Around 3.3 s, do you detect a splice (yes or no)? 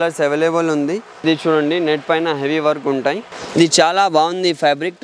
yes